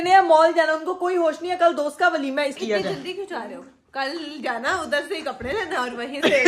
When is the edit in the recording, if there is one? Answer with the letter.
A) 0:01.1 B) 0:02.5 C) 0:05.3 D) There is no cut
B